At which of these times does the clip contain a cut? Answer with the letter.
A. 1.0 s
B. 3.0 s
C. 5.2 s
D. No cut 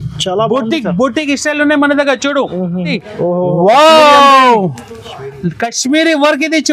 B